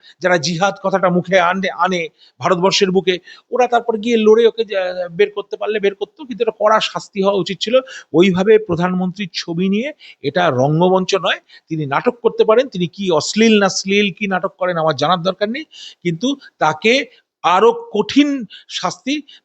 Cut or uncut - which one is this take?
uncut